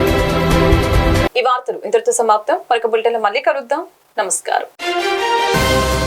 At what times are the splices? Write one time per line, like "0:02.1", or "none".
none